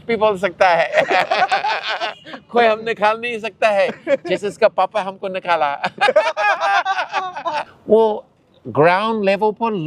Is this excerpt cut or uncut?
cut